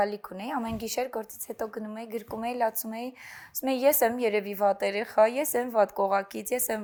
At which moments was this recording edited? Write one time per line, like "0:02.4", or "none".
none